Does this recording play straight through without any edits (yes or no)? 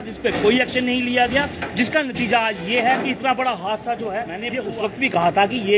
no